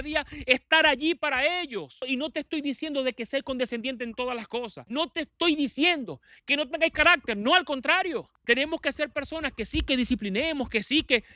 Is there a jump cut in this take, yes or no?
yes